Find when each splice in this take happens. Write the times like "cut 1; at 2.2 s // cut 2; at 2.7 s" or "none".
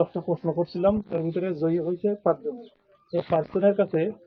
none